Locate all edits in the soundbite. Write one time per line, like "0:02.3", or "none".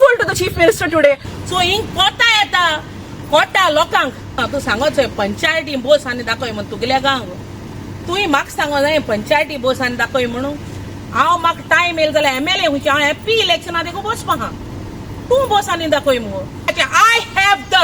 0:04.4
0:16.7